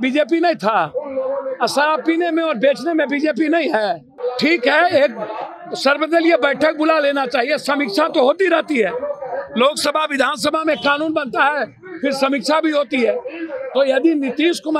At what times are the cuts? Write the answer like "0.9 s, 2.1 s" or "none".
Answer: 4.1 s